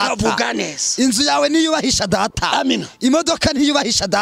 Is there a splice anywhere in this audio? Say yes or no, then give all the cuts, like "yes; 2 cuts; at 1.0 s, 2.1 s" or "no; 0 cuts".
no; 0 cuts